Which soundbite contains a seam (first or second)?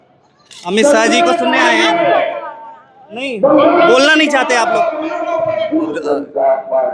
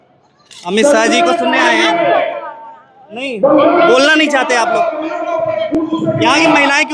first